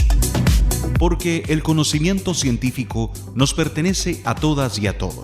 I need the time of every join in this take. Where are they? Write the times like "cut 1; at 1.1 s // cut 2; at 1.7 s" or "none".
cut 1; at 1.0 s

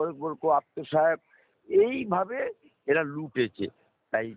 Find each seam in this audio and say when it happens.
none

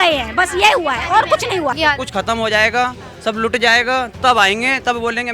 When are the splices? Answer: cut 1; at 1.8 s

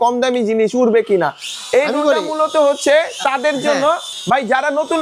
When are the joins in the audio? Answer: cut 1; at 4.1 s

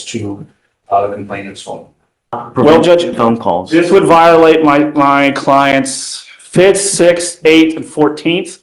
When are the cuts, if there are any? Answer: cut 1; at 2.4 s

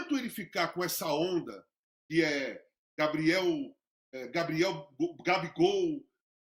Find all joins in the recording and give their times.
none

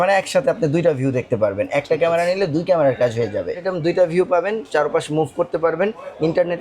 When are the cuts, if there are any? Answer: cut 1; at 3.7 s

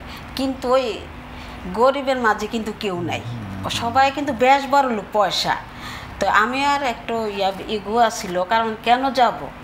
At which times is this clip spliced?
none

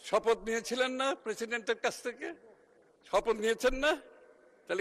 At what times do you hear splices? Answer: none

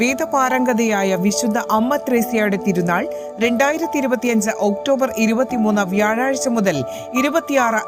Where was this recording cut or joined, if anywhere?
none

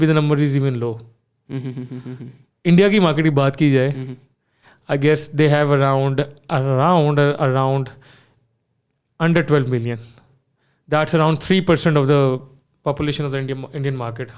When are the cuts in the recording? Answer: none

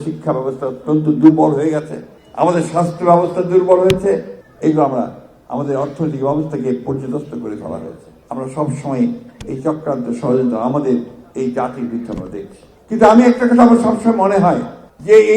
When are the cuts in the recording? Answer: none

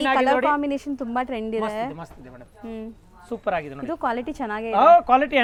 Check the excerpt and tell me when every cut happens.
none

